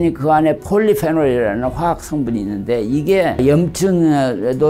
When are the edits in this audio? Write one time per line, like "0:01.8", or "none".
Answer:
none